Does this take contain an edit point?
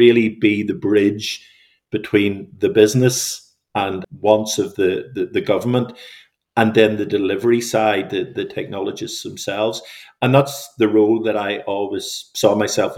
yes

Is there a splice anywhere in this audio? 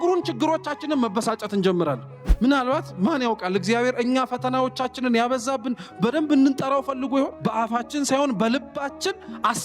yes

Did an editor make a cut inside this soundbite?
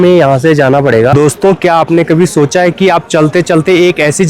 yes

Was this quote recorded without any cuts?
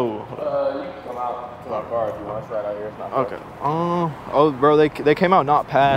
yes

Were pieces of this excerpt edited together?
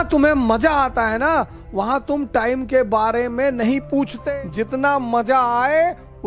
yes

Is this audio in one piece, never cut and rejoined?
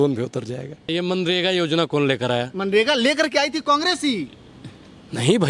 no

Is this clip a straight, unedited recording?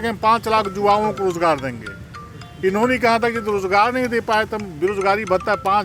yes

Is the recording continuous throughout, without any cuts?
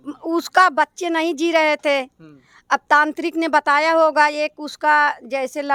yes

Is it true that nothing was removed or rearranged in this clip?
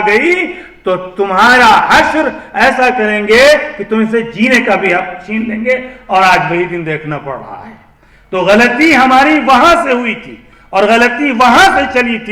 yes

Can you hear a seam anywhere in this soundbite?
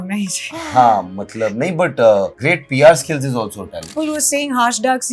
yes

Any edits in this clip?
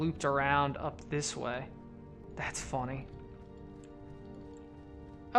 yes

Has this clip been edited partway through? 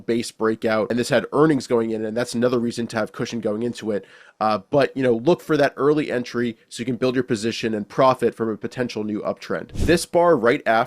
yes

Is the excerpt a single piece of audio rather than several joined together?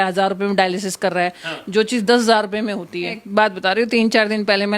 no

